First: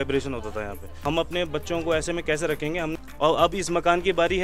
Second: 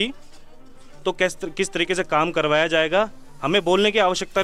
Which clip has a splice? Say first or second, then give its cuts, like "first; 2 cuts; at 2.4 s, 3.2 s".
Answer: first; 2 cuts; at 1.0 s, 2.9 s